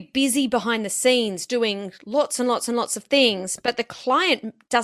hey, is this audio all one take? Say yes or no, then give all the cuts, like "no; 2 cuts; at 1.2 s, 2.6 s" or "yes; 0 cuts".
yes; 0 cuts